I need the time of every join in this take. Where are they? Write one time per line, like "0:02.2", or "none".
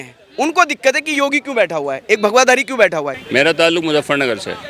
0:03.2